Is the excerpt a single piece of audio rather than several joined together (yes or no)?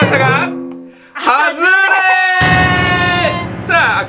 yes